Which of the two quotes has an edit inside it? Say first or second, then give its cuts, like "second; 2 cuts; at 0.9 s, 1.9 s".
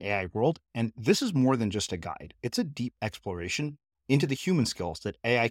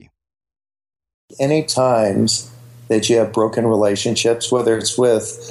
second; 1 cut; at 1.3 s